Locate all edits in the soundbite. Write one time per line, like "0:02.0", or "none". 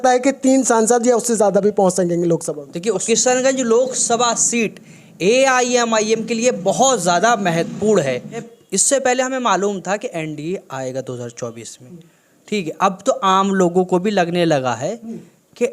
0:03.0
0:08.5